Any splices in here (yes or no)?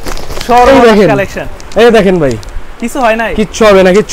no